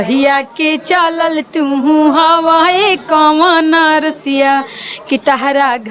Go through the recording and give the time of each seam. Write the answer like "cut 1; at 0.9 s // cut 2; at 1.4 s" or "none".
none